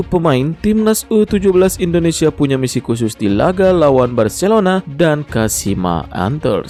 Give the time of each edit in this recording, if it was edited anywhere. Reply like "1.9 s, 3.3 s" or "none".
none